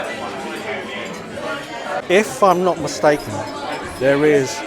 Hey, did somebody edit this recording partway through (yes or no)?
yes